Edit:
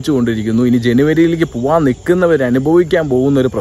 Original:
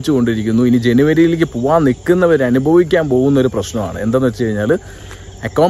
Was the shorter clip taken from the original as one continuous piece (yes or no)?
yes